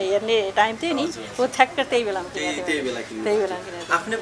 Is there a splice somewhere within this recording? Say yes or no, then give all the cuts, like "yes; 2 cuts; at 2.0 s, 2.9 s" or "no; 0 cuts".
no; 0 cuts